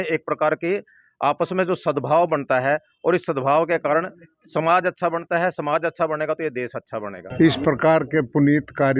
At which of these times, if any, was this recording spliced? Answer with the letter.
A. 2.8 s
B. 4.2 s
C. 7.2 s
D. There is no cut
C